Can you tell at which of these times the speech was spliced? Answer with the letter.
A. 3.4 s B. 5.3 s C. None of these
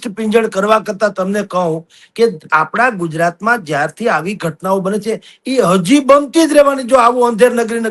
C